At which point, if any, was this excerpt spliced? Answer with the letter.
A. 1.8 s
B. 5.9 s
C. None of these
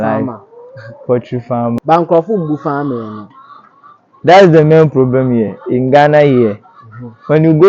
A